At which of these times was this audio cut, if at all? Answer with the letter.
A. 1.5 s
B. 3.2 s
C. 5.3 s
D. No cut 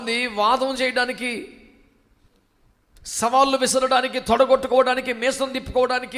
D